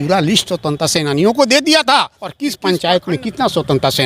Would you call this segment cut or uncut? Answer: cut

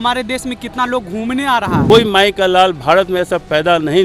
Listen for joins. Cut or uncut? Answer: cut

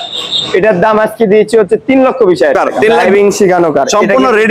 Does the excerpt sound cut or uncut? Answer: cut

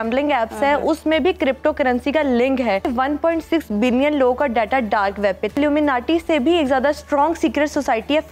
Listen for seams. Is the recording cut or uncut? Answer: cut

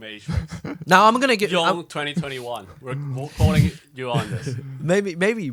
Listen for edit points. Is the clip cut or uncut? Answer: uncut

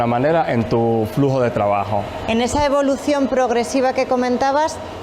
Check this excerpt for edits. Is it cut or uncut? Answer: uncut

